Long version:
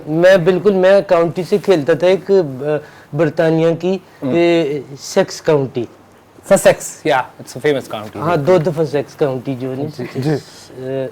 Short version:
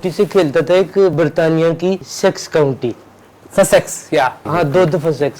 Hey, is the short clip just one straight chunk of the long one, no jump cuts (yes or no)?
no